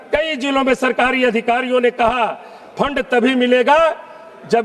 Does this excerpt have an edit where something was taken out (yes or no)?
no